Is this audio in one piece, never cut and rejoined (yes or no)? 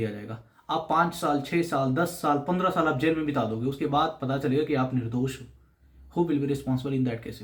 yes